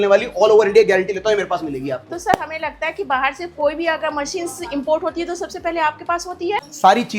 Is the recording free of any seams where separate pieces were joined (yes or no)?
yes